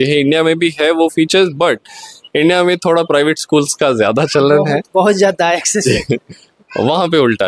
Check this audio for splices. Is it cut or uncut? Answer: uncut